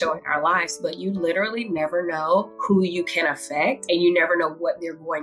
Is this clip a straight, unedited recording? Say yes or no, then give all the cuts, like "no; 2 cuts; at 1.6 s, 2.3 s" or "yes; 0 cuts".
no; 2 cuts; at 2.5 s, 3.8 s